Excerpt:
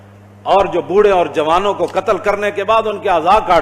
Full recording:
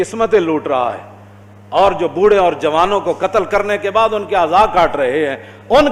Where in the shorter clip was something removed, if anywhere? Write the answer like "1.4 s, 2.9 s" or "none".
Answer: none